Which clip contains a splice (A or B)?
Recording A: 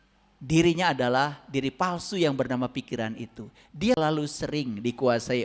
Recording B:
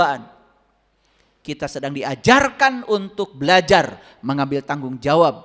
A